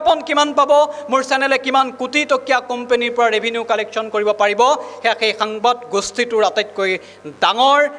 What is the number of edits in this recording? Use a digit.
0